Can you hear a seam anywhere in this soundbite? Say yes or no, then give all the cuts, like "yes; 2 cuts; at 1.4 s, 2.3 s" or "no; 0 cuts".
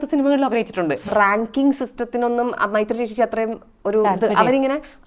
yes; 1 cut; at 1.1 s